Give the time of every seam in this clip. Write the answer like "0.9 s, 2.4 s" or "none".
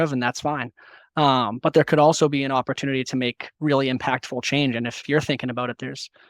5.0 s